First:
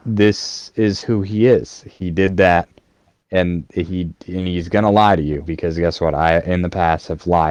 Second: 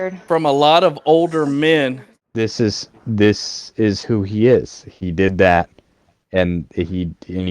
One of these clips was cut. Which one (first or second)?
second